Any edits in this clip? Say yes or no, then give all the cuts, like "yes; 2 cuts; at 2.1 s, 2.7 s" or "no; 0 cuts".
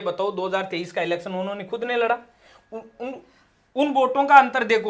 no; 0 cuts